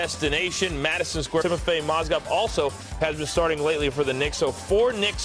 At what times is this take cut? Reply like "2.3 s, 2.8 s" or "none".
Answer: none